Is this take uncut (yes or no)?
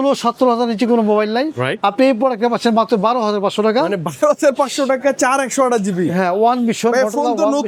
yes